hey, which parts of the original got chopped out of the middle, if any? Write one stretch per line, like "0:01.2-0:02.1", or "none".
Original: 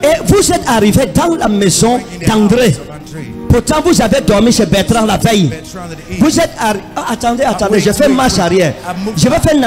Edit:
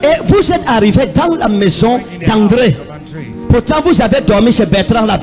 none